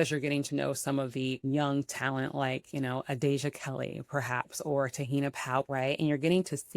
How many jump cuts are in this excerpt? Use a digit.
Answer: 2